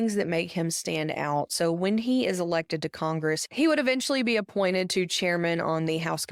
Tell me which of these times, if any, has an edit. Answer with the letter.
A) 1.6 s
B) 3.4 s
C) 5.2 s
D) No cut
D